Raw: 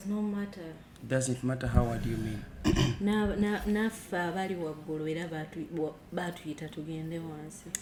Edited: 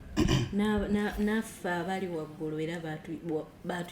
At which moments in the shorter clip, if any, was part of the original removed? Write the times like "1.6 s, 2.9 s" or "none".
none